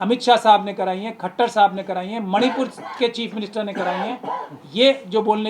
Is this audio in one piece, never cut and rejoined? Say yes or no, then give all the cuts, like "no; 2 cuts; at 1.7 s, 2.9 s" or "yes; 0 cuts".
yes; 0 cuts